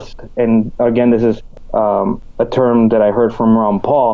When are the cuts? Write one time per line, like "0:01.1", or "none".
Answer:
0:01.9